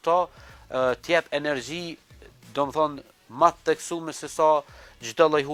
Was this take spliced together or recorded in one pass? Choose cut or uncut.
uncut